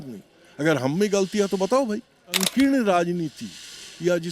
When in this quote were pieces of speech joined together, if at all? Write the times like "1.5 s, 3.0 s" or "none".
2.5 s